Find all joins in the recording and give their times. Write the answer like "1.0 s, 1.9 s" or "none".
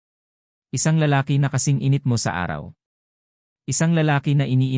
3.5 s